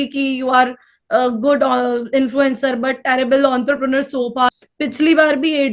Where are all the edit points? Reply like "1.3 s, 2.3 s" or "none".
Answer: 4.5 s